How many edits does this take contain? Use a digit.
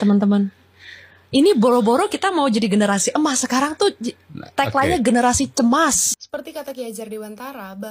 1